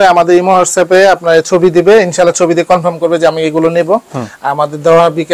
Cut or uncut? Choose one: uncut